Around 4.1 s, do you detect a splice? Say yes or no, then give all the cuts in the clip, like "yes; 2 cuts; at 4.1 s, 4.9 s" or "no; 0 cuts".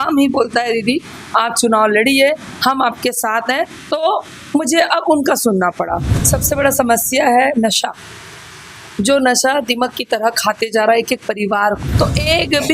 no; 2 cuts; at 6.1 s, 11.9 s